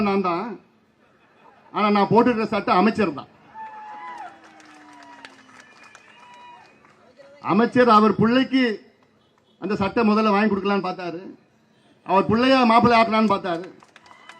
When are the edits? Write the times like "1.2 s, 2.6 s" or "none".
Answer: none